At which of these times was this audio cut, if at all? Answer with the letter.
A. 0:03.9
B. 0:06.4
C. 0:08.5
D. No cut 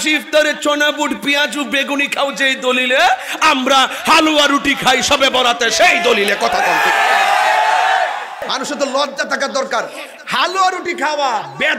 C